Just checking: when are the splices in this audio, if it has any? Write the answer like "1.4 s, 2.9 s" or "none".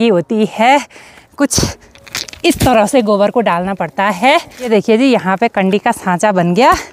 none